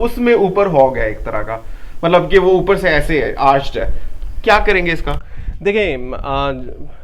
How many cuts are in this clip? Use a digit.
0